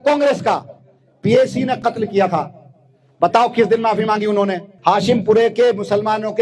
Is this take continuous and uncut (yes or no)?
no